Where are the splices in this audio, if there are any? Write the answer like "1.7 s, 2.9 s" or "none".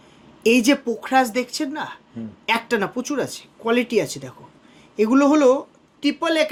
none